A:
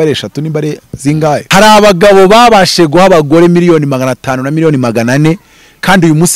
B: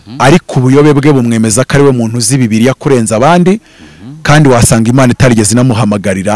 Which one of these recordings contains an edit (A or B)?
A